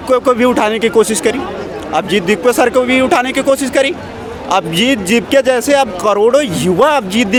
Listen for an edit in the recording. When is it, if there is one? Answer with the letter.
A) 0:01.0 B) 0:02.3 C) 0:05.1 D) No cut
D